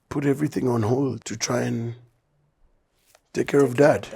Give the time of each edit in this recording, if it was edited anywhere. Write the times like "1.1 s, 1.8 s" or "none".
1.3 s